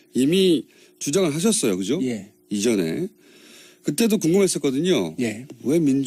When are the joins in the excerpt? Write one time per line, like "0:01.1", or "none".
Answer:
none